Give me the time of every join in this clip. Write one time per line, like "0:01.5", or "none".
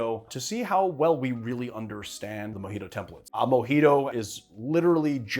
0:03.2
0:04.1